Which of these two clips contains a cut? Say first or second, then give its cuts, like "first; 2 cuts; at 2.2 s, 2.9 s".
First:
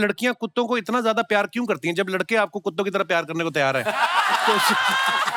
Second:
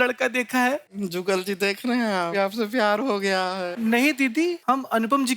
second; 4 cuts; at 0.9 s, 2.3 s, 3.5 s, 4.6 s